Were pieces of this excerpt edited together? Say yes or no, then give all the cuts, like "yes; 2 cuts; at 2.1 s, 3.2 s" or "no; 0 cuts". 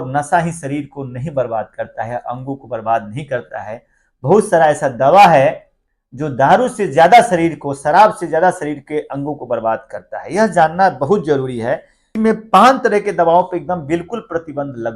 yes; 1 cut; at 12.1 s